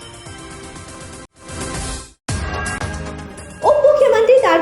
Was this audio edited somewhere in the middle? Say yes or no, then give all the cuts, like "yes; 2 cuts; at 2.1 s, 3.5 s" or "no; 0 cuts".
yes; 1 cut; at 2.1 s